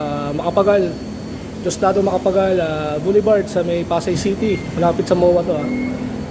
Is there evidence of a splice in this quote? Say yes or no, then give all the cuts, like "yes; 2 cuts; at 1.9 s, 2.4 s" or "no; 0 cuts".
no; 0 cuts